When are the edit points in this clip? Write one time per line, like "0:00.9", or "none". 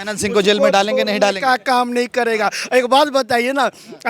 none